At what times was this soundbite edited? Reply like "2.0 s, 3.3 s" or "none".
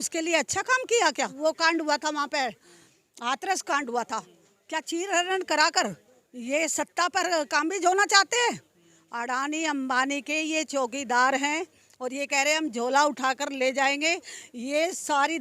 1.3 s